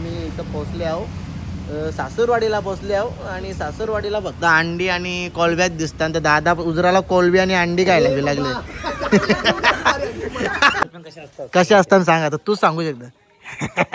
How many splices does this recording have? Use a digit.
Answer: 1